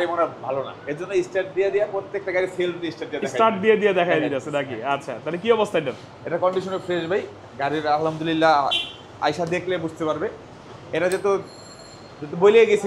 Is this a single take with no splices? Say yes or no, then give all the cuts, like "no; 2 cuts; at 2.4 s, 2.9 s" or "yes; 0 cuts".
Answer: yes; 0 cuts